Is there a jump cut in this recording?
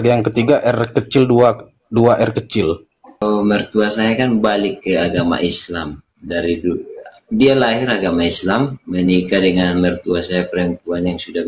yes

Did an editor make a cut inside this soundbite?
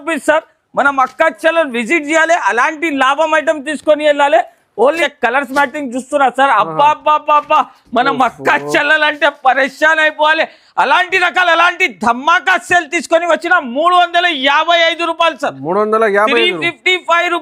yes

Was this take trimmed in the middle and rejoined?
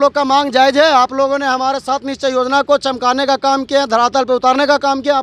no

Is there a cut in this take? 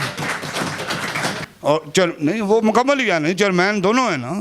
yes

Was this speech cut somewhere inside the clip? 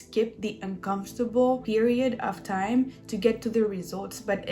yes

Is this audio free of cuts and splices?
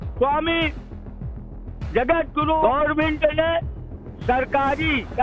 no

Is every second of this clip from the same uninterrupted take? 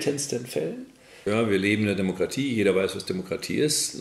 no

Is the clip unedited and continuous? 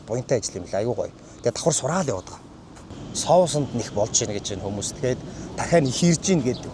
no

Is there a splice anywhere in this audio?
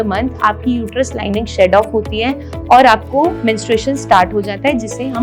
no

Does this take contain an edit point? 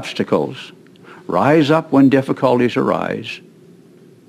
no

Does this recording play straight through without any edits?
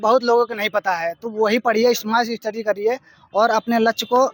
yes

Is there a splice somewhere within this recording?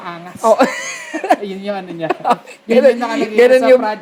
no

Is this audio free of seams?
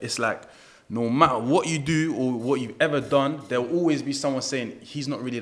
yes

